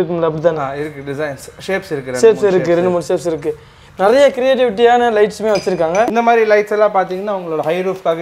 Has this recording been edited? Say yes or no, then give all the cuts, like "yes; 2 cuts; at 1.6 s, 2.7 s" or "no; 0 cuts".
yes; 1 cut; at 6.1 s